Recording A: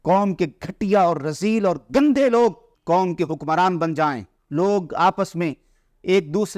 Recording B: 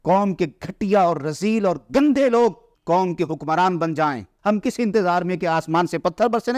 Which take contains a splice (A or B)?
B